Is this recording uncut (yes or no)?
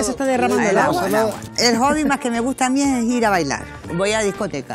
no